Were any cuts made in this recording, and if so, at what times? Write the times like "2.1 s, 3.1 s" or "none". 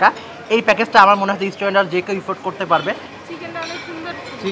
3.1 s